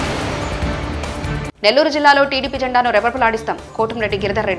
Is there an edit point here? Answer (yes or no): no